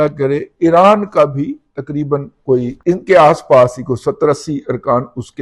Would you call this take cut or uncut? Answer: cut